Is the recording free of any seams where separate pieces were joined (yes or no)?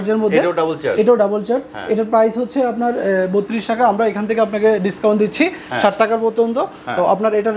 yes